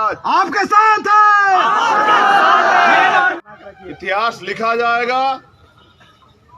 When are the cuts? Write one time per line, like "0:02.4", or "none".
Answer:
0:03.3